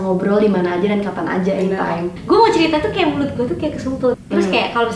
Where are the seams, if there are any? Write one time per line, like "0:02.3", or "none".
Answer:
0:02.1
0:04.2